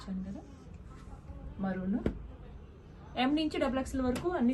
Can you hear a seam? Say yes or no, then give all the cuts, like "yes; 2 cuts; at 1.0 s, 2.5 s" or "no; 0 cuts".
no; 0 cuts